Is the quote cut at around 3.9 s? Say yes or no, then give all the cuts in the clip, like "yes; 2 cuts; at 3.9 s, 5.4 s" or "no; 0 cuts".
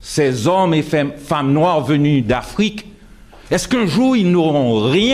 no; 0 cuts